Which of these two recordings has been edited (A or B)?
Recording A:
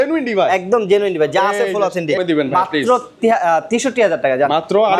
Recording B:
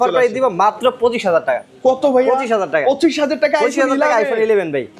A